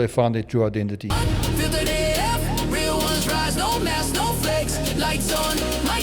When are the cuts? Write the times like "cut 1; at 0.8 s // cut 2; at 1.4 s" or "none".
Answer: cut 1; at 1.0 s